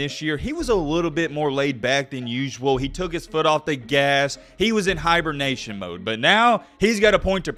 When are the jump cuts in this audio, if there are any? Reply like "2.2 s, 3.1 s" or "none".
none